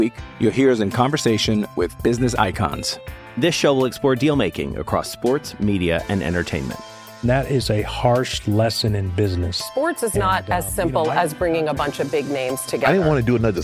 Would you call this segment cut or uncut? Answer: uncut